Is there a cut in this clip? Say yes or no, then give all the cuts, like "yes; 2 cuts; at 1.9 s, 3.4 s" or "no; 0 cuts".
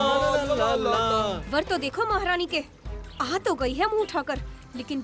yes; 1 cut; at 1.5 s